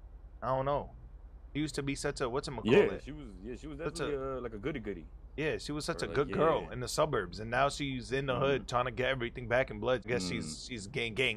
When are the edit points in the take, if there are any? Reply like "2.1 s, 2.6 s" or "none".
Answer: 10.1 s